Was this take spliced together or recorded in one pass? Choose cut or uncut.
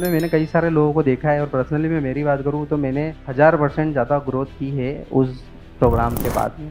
uncut